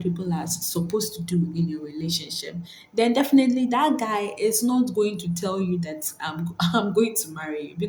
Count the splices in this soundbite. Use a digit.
0